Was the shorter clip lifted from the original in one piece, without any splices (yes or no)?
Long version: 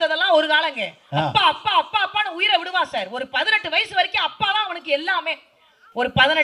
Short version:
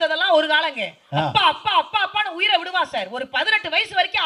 yes